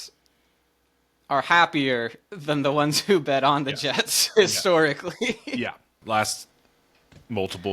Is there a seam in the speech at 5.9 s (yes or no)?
yes